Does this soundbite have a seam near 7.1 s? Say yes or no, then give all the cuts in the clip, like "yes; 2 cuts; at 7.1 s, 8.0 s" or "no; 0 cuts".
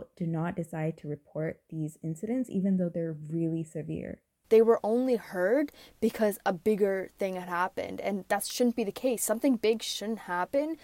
no; 1 cut; at 4.3 s